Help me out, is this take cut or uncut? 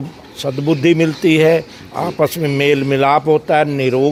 uncut